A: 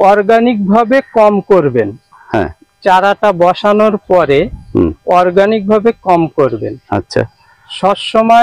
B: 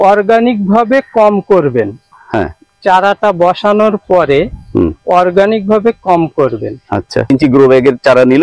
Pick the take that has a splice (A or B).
B